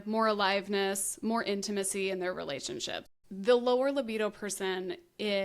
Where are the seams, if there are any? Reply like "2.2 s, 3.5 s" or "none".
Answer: 3.0 s